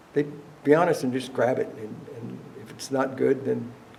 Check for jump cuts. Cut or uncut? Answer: uncut